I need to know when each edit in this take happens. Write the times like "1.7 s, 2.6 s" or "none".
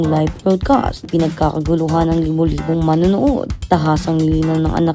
1.1 s, 3.5 s